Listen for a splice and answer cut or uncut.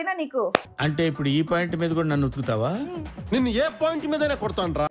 uncut